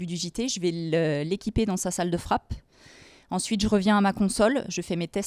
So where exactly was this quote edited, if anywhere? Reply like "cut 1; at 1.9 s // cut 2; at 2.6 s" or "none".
none